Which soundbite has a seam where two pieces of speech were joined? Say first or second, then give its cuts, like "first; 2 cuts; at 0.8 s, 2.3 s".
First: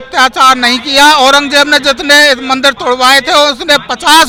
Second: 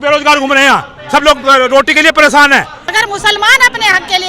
second; 1 cut; at 2.9 s